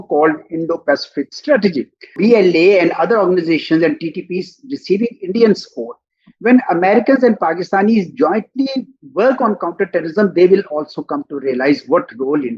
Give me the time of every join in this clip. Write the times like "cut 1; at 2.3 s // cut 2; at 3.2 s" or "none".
cut 1; at 2.1 s